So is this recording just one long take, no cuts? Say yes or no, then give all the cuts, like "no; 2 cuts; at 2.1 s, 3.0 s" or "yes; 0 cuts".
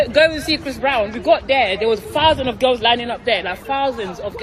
yes; 0 cuts